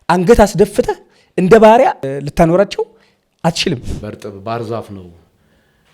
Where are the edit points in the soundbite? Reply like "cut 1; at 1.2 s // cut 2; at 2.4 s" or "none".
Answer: cut 1; at 2.0 s // cut 2; at 3.8 s